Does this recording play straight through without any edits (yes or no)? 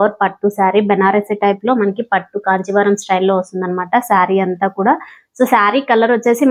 yes